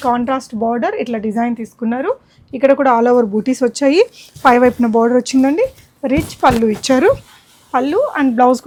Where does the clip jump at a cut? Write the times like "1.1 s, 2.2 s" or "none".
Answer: none